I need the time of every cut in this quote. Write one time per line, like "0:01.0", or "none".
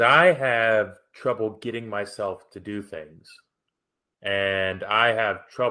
none